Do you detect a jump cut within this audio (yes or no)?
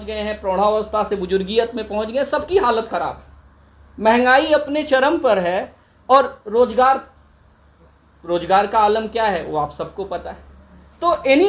no